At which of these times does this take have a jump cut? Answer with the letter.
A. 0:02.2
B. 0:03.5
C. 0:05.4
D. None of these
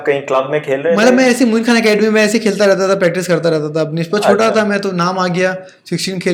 D